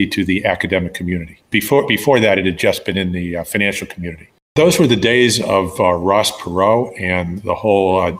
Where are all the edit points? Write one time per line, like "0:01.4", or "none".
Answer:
0:01.3
0:04.5

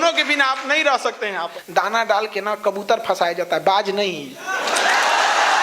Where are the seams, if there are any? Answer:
0:01.6

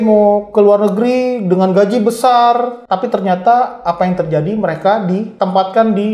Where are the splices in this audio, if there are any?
0:02.8
0:05.3

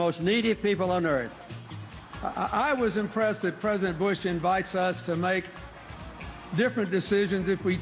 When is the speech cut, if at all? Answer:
0:02.9

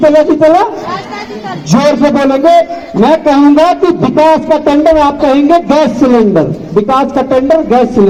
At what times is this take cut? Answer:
none

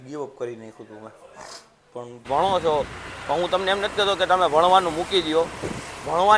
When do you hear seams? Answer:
0:02.3

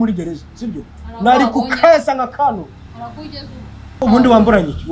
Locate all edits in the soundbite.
0:04.0

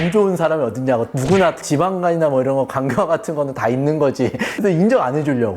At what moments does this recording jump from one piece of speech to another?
0:04.5

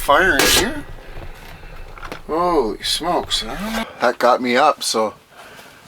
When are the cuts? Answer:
0:03.9

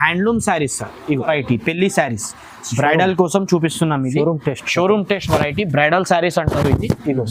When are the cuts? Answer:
0:01.3

